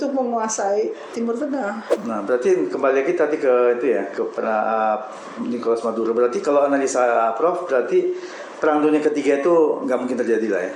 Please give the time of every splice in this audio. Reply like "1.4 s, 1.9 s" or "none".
1.9 s